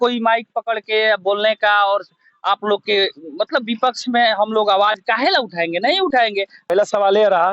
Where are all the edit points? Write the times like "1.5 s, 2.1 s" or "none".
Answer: 6.6 s

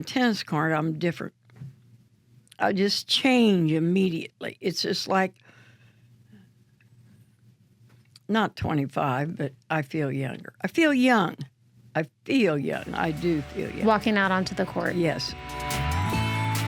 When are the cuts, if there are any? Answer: 15.3 s

